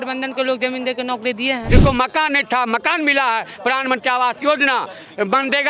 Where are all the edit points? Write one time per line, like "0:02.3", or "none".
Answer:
0:01.6